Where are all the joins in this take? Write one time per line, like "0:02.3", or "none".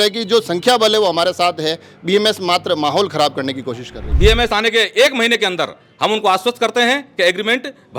0:04.1